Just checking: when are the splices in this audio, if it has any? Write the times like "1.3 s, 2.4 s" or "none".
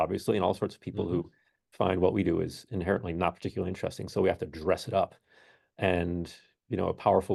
none